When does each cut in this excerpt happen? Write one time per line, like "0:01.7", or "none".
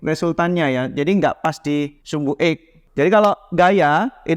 0:02.7